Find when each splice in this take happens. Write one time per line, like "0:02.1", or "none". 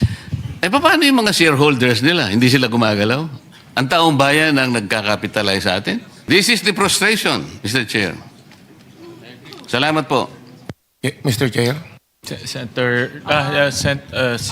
0:06.1